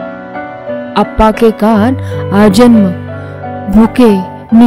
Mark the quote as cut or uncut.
cut